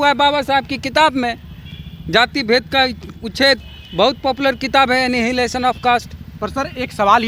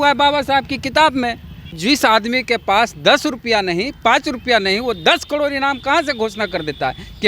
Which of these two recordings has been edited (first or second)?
second